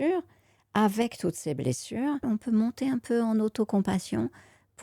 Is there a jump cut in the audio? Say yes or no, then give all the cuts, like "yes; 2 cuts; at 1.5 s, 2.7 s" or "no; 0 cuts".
yes; 1 cut; at 2.2 s